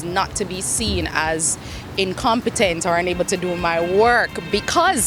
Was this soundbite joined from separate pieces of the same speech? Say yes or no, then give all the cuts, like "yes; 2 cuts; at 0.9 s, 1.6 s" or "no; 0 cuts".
no; 0 cuts